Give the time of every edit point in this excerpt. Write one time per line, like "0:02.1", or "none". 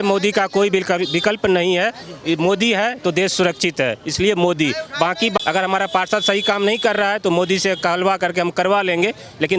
none